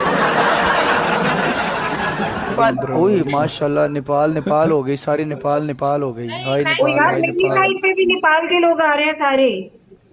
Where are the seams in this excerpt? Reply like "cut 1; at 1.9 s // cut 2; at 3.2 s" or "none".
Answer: cut 1; at 2.5 s